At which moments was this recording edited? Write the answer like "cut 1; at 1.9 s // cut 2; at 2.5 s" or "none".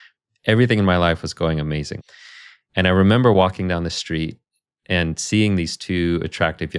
cut 1; at 2.0 s